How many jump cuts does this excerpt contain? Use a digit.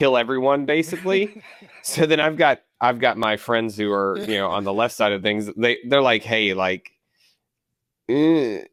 0